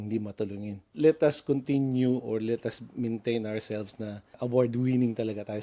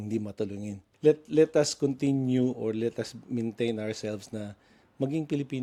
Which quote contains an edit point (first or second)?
first